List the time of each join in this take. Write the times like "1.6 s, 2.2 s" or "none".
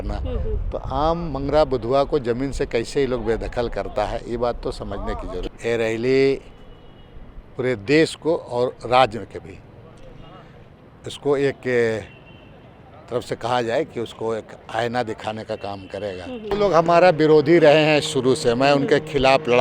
5.4 s, 16.5 s